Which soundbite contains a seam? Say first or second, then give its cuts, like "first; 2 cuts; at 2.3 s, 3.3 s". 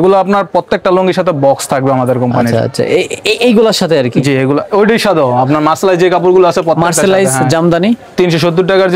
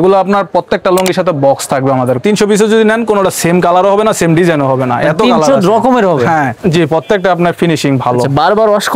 second; 2 cuts; at 2.2 s, 6.6 s